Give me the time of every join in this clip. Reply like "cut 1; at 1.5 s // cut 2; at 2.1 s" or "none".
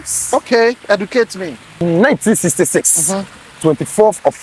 cut 1; at 1.8 s